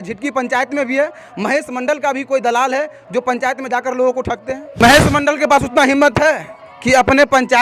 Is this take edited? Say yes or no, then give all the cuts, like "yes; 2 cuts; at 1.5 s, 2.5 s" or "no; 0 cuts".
yes; 1 cut; at 4.8 s